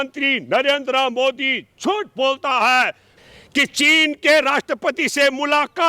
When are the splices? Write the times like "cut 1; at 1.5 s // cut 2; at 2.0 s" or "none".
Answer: cut 1; at 3.1 s